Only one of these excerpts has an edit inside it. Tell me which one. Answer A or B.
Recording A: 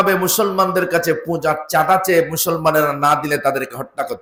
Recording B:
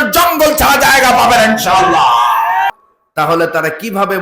B